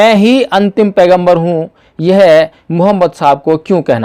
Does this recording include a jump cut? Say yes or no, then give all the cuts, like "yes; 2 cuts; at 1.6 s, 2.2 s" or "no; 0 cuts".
no; 0 cuts